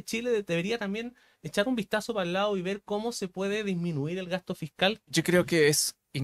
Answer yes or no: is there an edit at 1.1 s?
no